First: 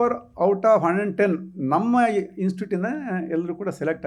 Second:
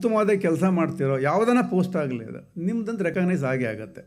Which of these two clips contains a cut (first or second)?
second